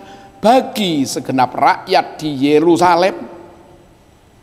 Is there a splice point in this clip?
no; 0 cuts

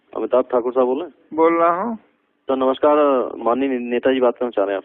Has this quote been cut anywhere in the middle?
no; 0 cuts

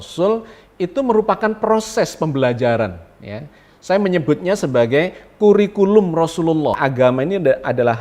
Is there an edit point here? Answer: yes; 1 cut; at 6.8 s

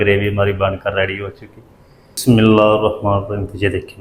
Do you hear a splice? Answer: yes; 1 cut; at 2.2 s

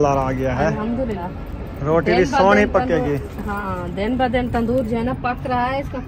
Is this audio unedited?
no; 2 cuts; at 1.2 s, 3.7 s

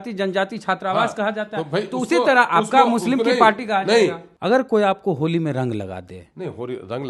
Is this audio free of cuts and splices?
no; 1 cut; at 4.3 s

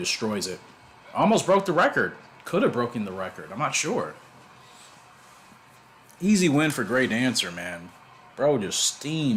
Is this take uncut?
yes; 0 cuts

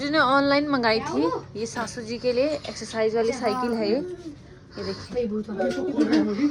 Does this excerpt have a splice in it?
no; 0 cuts

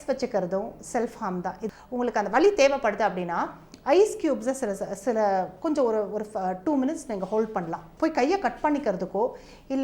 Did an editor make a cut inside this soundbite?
yes; 2 cuts; at 1.7 s, 7.9 s

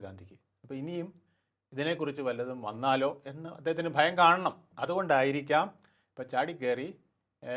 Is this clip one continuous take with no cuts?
yes; 0 cuts

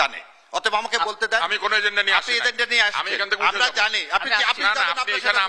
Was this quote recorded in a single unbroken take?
yes; 0 cuts

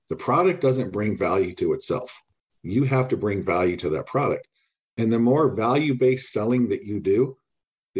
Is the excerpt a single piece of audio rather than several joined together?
yes; 0 cuts

